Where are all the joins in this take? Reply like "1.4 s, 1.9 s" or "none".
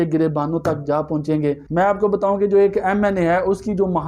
1.6 s